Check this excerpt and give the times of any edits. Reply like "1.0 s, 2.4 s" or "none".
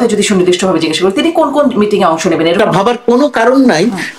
2.6 s

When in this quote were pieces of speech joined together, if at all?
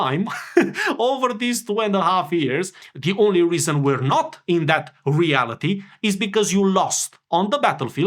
2.8 s

